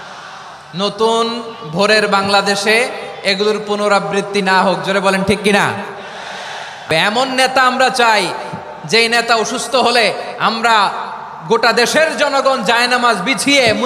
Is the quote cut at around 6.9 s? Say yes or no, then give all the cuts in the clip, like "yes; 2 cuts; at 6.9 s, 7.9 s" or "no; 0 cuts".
yes; 1 cut; at 6.9 s